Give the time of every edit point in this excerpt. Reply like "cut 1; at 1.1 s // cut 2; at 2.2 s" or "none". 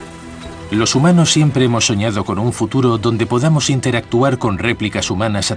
none